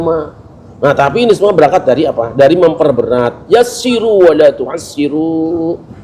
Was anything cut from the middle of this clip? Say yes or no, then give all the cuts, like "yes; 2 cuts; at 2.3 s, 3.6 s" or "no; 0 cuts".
no; 0 cuts